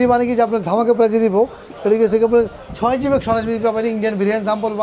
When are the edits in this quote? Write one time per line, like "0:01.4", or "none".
none